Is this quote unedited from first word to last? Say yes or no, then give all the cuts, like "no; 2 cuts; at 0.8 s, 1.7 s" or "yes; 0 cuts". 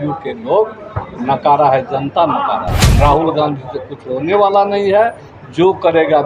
no; 1 cut; at 2.9 s